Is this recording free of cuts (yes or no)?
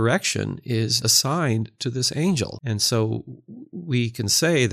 no